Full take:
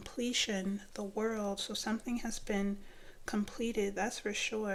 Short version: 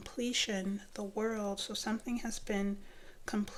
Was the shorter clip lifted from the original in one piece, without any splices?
yes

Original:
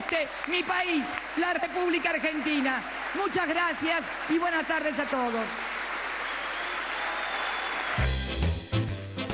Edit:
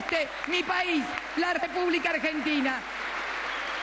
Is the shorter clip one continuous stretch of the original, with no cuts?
no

